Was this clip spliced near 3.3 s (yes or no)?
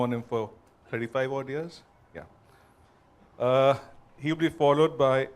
yes